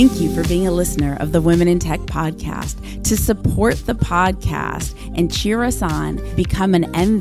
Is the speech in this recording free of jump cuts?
yes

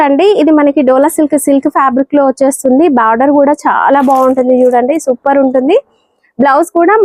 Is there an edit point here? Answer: no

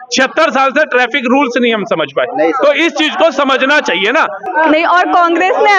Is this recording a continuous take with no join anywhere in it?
no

